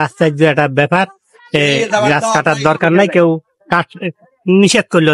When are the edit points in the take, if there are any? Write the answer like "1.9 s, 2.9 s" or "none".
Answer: none